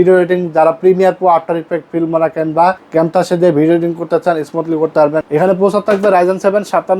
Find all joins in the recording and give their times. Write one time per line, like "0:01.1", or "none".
0:02.8
0:05.3